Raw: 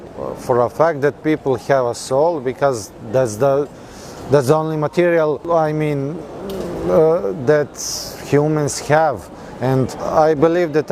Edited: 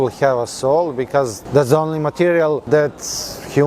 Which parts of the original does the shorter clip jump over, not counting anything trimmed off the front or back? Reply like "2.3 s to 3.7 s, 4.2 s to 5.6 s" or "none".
2.9 s to 4.2 s, 5.4 s to 7.4 s